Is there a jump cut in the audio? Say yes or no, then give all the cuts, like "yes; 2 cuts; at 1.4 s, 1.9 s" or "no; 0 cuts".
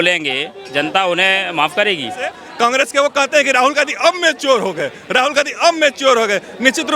yes; 1 cut; at 2.4 s